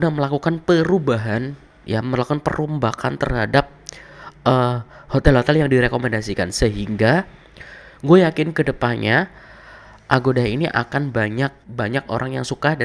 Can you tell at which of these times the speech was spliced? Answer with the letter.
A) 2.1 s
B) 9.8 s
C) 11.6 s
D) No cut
C